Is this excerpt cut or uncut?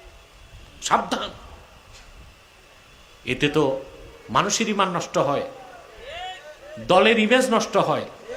uncut